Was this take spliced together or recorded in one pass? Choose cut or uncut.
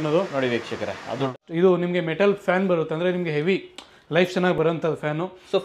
cut